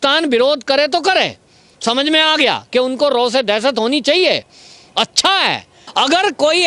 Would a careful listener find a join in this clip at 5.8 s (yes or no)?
yes